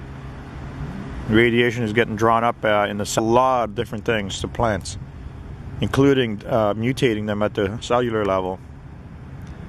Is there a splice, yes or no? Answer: no